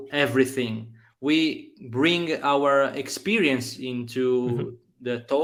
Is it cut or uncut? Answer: uncut